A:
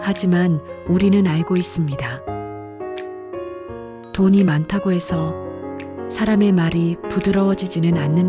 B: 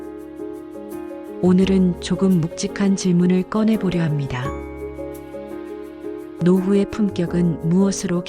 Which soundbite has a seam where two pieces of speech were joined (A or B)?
B